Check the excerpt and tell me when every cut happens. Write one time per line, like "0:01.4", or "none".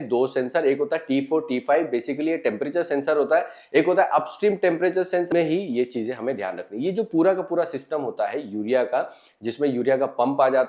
0:05.3